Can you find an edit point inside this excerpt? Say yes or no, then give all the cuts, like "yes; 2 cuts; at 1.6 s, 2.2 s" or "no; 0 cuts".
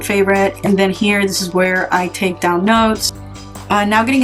yes; 1 cut; at 3.3 s